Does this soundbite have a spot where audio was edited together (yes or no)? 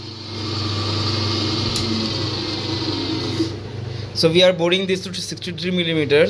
no